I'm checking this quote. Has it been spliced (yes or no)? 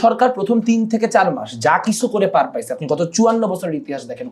no